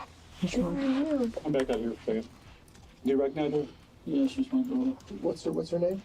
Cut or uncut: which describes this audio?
cut